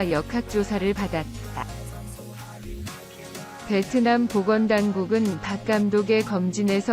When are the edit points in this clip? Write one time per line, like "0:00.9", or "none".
0:01.7
0:03.7